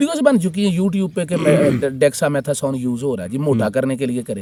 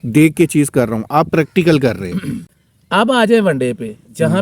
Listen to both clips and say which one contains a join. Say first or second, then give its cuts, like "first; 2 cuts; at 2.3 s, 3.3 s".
second; 1 cut; at 2.5 s